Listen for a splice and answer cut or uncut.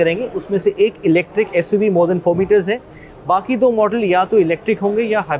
uncut